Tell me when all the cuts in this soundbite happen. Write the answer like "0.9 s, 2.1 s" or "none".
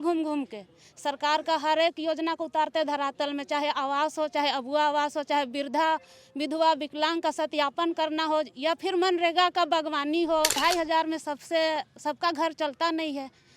10.5 s